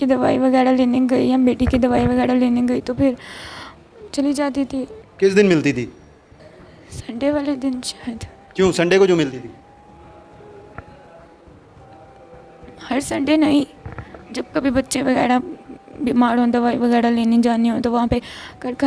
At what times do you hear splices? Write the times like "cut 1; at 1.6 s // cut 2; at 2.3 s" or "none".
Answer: none